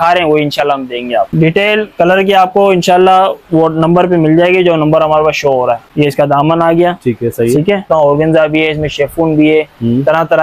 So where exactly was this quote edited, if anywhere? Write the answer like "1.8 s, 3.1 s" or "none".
1.3 s, 5.8 s, 7.9 s